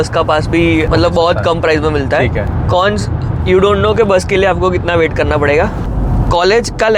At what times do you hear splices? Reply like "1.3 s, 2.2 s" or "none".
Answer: 0.9 s, 2.5 s, 5.8 s